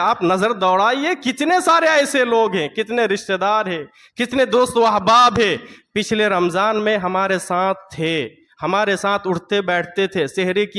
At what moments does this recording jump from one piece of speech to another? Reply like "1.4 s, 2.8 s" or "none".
none